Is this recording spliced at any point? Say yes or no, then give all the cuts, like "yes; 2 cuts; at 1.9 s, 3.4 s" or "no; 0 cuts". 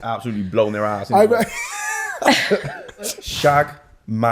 yes; 1 cut; at 3.2 s